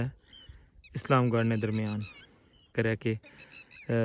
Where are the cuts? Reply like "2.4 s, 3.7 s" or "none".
2.7 s